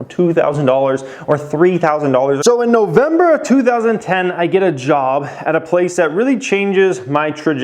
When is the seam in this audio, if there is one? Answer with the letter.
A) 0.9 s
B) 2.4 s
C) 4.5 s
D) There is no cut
B